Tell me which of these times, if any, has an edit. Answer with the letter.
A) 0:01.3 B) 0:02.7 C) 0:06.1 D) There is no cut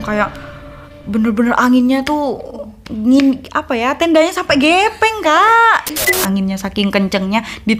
C